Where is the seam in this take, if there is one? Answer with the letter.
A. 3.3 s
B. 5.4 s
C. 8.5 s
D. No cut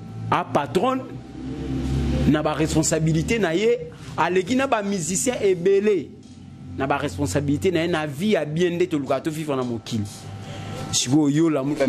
D